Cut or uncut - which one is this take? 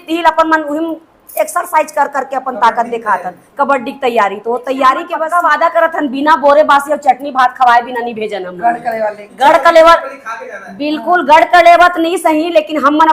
cut